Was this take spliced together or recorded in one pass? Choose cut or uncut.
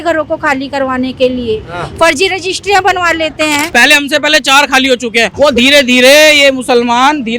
cut